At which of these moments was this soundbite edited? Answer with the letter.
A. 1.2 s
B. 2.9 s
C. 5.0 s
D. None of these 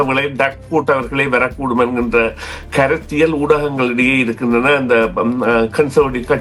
D